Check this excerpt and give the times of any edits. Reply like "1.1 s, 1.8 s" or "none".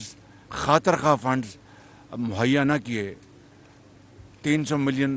none